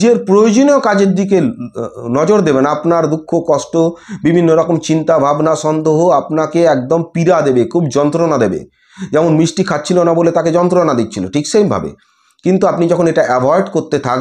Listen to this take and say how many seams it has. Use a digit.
0